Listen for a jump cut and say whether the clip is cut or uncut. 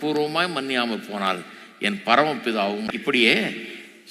uncut